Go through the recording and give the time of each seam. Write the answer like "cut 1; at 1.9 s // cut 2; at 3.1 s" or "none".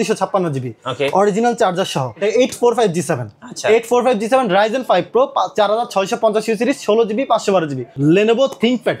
cut 1; at 2.1 s // cut 2; at 7.9 s